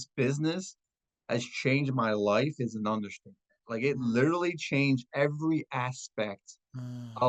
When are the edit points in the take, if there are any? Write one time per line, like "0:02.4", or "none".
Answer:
none